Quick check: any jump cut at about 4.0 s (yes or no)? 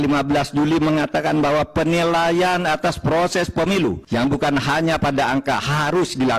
yes